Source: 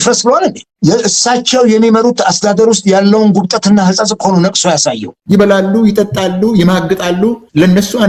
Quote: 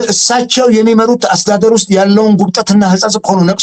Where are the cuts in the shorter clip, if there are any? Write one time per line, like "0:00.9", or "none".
none